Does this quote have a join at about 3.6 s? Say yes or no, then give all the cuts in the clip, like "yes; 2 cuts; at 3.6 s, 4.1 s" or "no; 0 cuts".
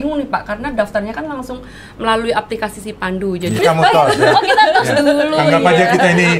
yes; 1 cut; at 3.6 s